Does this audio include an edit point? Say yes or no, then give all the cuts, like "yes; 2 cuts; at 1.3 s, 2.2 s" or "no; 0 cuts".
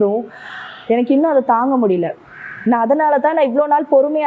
no; 0 cuts